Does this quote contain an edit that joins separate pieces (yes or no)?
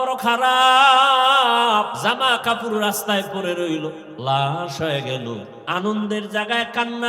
yes